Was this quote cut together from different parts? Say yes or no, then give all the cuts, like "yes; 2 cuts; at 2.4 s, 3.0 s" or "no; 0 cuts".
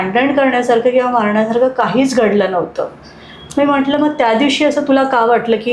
no; 0 cuts